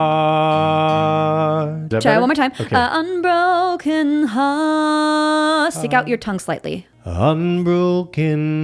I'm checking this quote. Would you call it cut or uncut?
cut